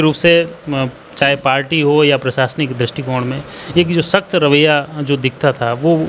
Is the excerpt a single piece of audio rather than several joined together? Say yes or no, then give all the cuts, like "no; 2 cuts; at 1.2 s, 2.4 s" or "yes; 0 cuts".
yes; 0 cuts